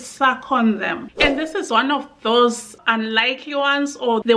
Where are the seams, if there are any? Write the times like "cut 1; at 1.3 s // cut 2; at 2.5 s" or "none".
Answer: cut 1; at 1.0 s